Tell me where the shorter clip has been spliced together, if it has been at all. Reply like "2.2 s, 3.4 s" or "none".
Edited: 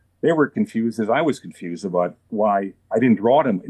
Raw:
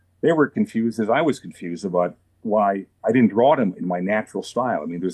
2.2 s